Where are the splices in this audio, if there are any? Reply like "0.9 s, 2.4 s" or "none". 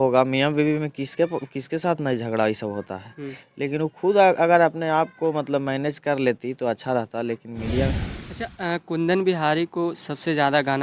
7.9 s